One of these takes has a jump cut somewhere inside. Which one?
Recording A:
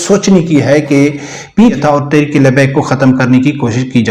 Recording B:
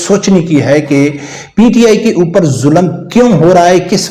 A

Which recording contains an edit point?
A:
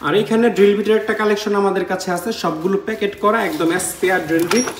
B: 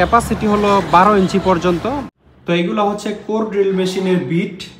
B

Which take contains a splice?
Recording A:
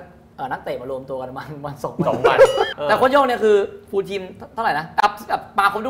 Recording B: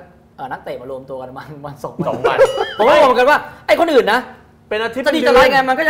A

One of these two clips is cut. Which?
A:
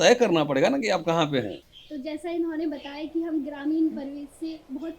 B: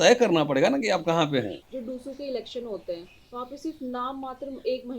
B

